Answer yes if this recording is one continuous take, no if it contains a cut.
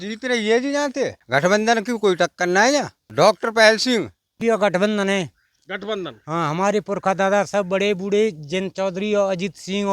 no